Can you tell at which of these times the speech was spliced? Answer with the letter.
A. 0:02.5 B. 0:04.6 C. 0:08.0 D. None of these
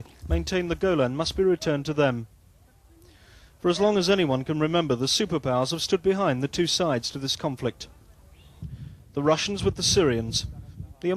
B